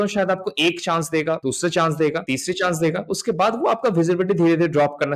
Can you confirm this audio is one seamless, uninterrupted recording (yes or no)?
no